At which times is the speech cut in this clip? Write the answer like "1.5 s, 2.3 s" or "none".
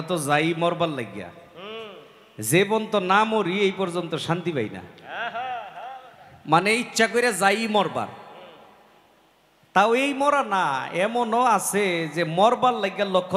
none